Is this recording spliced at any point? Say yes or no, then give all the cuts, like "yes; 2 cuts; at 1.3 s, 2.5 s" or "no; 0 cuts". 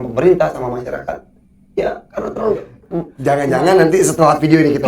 yes; 1 cut; at 3.1 s